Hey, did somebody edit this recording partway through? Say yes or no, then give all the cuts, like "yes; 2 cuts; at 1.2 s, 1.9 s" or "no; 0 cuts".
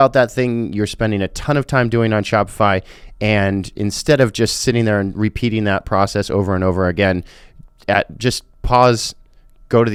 no; 0 cuts